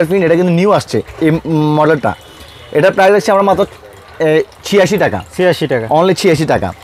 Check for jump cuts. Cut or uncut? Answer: uncut